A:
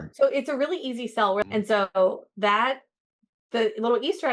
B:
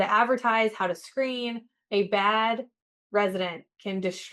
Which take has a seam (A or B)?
A